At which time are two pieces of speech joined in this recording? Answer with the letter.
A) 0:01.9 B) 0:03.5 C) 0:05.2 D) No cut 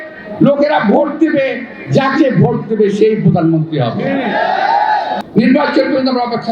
C